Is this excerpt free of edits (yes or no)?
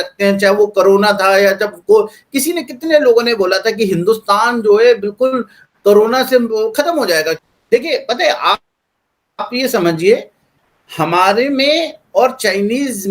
no